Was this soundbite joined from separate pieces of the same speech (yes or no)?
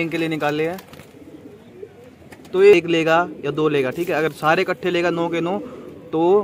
yes